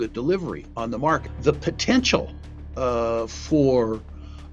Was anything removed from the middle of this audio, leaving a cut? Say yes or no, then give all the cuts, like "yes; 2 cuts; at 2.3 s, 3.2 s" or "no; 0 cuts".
yes; 1 cut; at 1.3 s